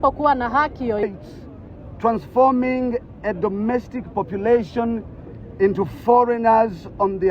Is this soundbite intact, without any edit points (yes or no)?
no